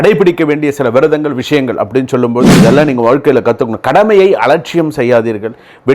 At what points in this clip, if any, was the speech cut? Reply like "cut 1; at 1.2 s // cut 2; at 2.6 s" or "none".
cut 1; at 2.5 s